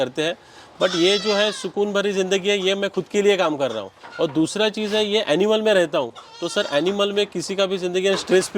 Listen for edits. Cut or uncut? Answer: uncut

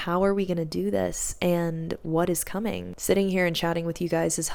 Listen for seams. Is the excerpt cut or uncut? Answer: uncut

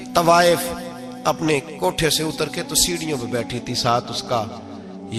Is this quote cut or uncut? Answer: uncut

